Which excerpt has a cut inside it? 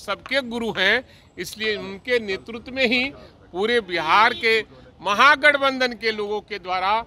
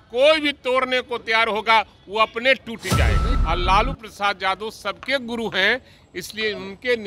second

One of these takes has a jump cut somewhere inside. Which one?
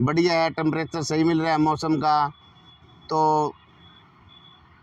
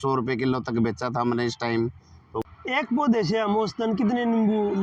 second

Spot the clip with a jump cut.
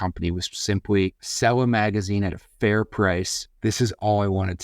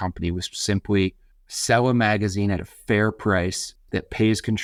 first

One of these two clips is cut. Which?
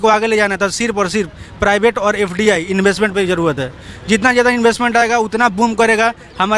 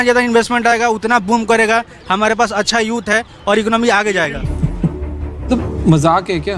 second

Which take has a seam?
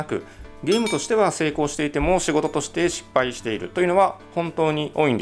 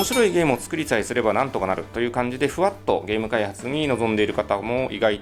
first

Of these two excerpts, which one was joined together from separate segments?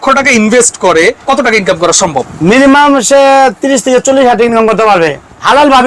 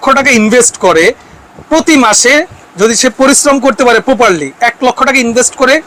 first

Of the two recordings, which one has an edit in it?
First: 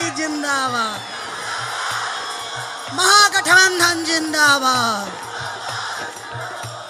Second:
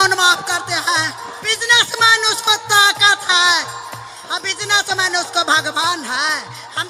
second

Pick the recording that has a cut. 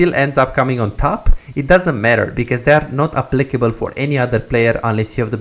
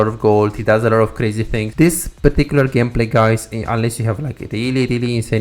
second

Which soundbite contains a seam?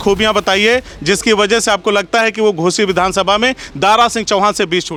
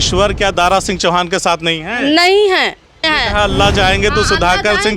second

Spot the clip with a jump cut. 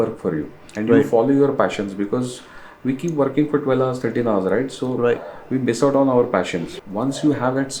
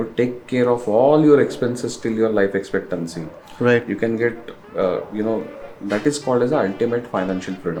first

